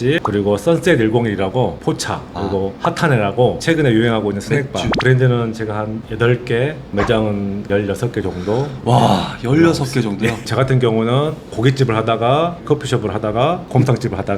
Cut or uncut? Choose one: cut